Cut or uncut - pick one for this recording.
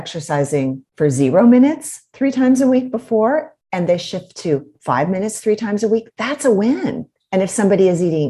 cut